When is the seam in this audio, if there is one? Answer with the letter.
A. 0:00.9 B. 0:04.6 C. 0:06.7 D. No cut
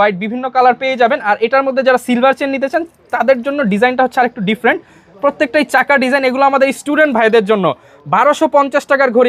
D